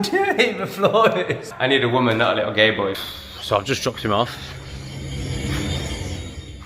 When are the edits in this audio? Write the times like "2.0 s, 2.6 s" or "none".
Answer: 1.5 s, 3.0 s